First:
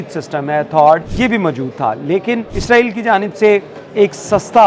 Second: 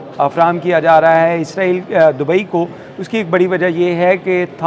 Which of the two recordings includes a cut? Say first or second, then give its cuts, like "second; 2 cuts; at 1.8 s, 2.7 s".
first; 2 cuts; at 1.1 s, 2.5 s